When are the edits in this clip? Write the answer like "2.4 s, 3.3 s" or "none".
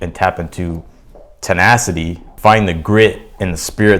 2.3 s

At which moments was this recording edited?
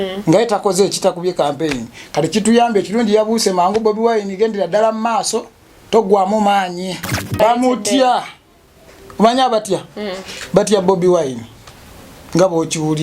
7.2 s

